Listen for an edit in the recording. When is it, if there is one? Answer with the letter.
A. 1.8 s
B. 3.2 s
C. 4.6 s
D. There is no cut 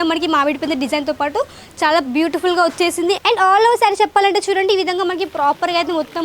B